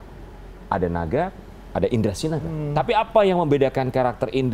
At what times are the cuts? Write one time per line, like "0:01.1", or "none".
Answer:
0:02.5